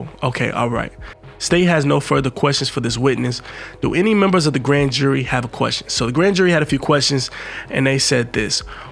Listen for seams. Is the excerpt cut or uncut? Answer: uncut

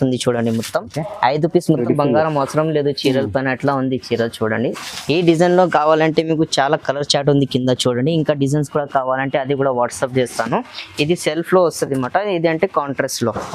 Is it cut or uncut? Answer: cut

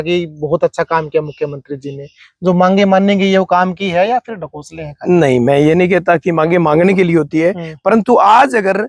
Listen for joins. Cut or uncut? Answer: uncut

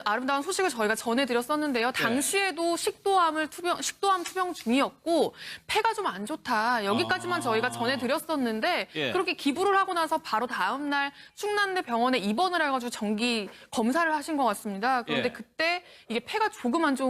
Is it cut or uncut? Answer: cut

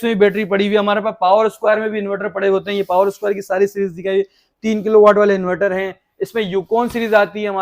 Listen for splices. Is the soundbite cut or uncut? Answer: uncut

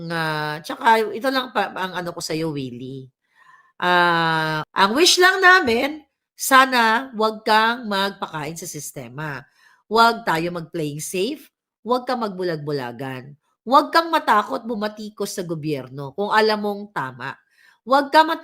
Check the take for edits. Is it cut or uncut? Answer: cut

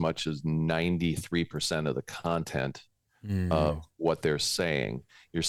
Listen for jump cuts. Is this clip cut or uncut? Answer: uncut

